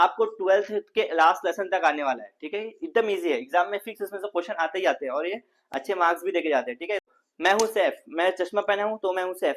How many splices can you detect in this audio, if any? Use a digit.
1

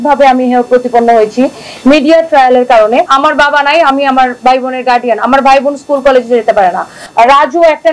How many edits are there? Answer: 2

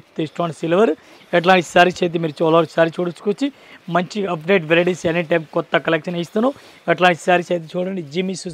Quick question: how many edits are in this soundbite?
0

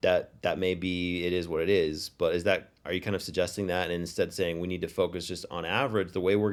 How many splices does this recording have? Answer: 0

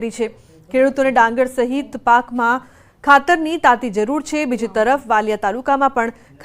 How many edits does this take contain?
1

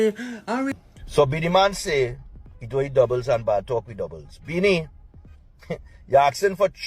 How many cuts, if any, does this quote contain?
1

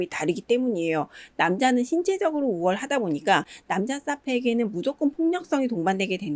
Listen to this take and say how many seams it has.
1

